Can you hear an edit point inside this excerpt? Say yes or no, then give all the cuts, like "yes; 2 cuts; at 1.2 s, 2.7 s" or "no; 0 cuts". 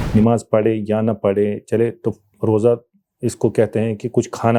no; 0 cuts